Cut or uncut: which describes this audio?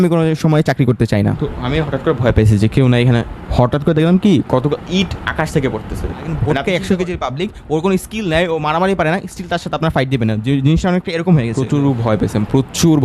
cut